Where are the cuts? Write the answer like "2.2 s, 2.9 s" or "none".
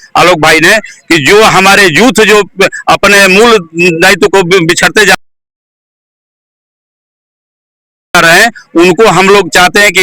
none